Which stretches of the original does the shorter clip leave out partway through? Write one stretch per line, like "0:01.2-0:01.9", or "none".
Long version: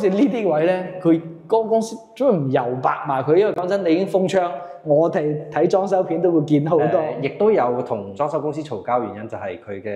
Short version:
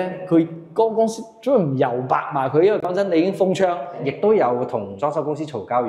0:04.7-0:07.2